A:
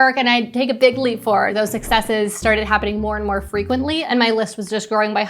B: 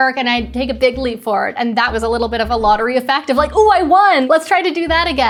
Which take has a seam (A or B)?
A